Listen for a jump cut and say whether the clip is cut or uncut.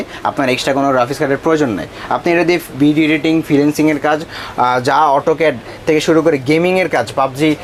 uncut